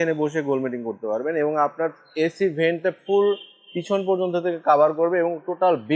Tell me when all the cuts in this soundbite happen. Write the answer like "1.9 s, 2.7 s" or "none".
none